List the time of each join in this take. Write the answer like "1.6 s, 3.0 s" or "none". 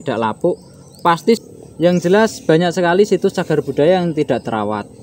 1.4 s